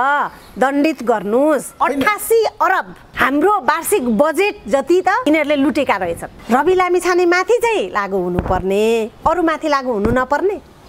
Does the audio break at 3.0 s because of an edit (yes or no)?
yes